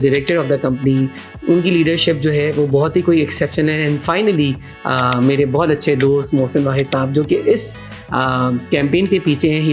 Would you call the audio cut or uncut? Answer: uncut